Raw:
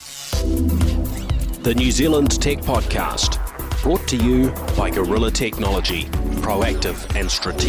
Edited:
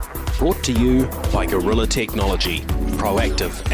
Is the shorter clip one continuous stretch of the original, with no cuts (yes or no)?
yes